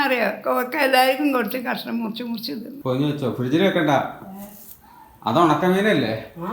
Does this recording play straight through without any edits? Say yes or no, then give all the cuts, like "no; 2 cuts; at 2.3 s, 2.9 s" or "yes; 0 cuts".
no; 1 cut; at 2.7 s